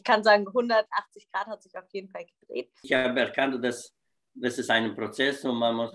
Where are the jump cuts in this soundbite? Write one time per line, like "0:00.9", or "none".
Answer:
0:02.8